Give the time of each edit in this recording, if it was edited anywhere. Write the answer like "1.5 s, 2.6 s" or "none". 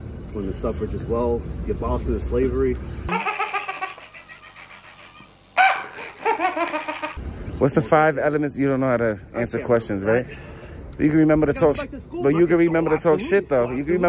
none